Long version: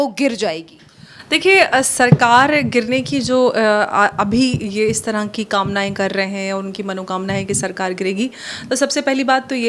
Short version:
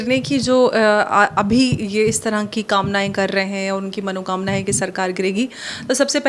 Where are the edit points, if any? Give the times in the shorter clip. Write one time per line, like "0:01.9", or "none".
none